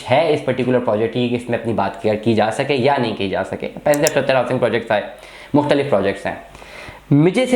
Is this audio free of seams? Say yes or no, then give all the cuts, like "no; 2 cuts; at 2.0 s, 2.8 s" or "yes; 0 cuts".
yes; 0 cuts